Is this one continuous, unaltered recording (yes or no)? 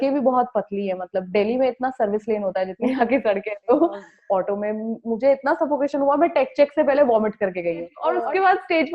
no